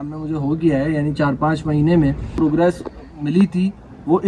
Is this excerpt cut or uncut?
cut